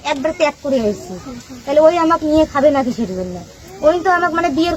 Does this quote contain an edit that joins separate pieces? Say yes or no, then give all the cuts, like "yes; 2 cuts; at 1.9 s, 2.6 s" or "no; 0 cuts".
no; 0 cuts